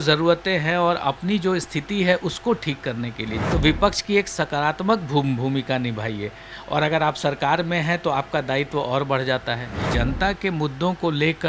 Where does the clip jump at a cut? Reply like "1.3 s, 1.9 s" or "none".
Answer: 3.4 s, 9.9 s

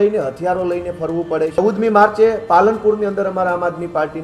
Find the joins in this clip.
1.6 s

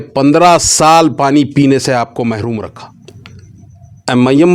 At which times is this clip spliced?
3.2 s

